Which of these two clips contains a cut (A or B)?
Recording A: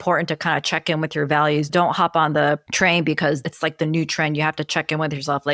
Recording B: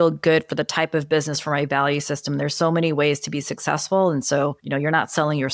A